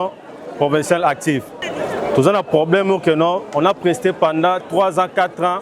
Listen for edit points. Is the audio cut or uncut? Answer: cut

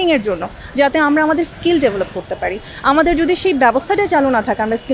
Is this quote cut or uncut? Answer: uncut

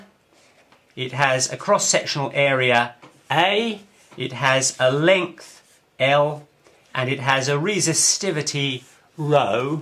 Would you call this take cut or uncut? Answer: uncut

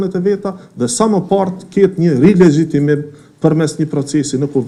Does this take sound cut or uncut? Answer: uncut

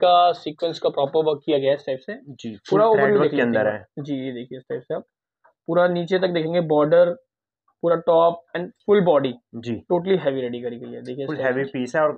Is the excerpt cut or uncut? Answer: uncut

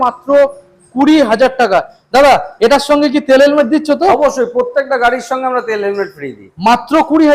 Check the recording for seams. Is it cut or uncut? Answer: uncut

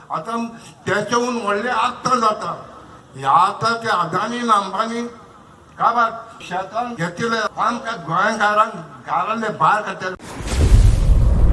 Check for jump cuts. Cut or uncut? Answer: cut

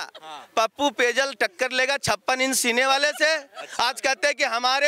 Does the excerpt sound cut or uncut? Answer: uncut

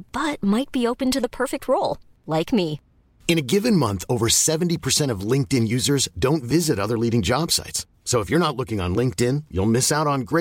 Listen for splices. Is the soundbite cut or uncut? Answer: uncut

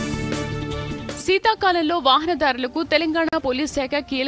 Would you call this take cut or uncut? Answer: uncut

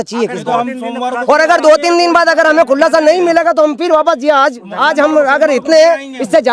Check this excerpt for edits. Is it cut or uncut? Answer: uncut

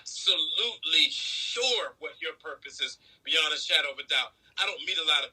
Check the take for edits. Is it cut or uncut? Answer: uncut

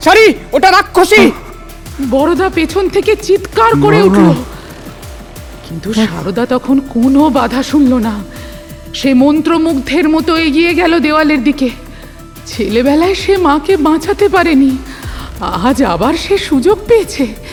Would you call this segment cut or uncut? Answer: uncut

